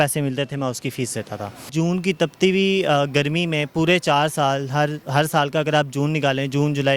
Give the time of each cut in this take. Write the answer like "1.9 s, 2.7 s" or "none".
1.7 s